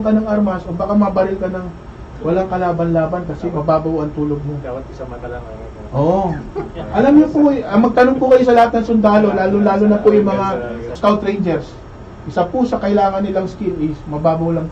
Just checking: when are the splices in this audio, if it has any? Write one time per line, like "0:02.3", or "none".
0:11.0